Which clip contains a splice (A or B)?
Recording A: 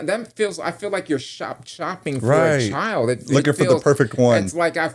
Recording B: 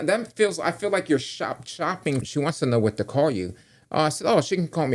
B